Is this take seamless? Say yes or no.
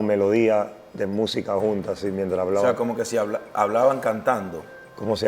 yes